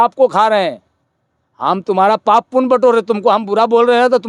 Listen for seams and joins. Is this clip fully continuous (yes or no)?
yes